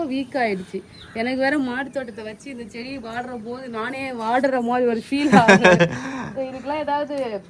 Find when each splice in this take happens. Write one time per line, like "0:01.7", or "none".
none